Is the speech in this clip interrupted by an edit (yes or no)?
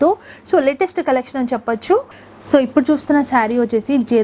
yes